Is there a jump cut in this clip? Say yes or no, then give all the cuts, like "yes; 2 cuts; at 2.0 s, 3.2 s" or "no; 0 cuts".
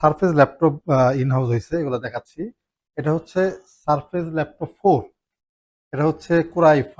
no; 0 cuts